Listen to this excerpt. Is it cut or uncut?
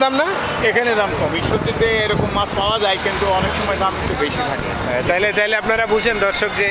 uncut